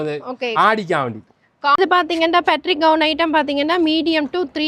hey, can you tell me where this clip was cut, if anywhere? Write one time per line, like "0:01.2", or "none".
0:01.8